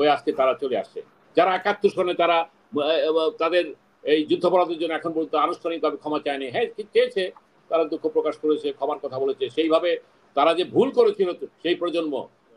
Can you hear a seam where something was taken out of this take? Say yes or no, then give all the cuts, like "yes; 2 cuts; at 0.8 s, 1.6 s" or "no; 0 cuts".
no; 0 cuts